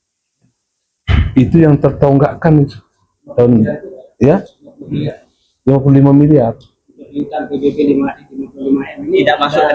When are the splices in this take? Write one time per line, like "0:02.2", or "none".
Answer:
none